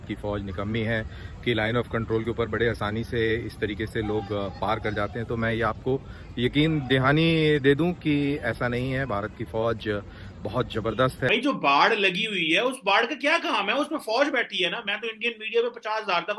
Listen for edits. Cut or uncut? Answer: cut